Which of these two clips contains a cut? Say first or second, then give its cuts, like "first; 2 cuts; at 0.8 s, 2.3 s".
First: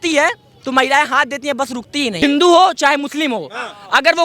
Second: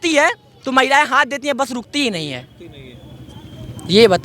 first; 1 cut; at 2.2 s